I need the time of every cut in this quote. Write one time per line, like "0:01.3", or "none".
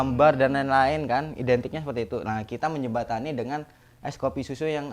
none